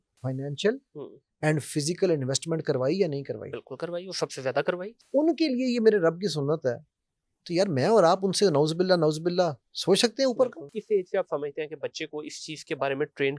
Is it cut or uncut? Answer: cut